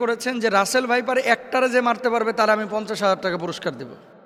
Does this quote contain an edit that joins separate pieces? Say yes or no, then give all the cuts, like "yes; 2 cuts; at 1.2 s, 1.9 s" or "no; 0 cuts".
no; 0 cuts